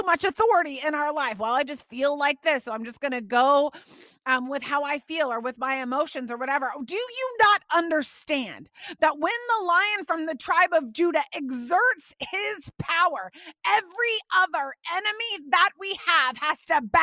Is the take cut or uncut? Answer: uncut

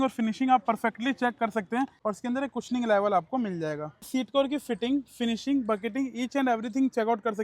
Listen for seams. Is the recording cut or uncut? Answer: cut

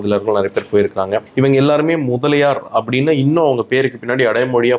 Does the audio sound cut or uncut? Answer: uncut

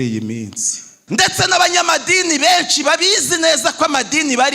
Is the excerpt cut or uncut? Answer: cut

